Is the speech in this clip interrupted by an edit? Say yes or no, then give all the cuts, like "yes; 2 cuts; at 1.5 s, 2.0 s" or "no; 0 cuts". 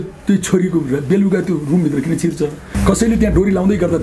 yes; 1 cut; at 2.7 s